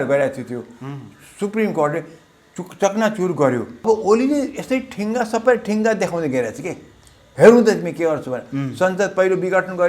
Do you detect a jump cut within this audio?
yes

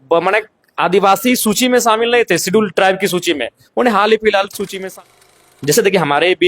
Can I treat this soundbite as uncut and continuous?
no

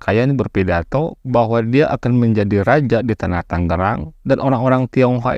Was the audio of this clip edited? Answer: no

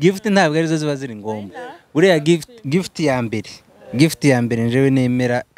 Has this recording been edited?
no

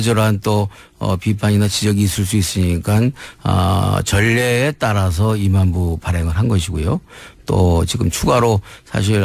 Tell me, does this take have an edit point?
yes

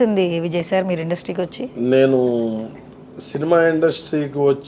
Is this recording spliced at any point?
no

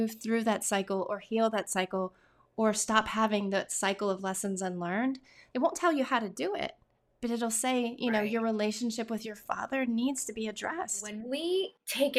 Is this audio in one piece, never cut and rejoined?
no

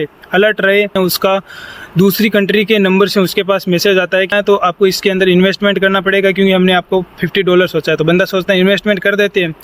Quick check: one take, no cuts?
no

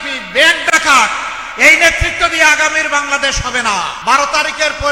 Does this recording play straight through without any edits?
no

